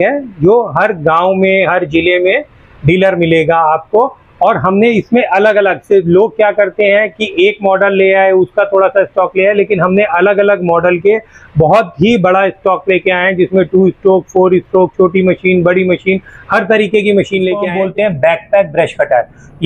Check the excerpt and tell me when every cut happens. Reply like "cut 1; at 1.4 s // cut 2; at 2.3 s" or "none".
cut 1; at 17.7 s